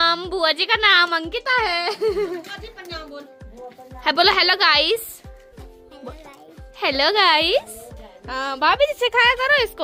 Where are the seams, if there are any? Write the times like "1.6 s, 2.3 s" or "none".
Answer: none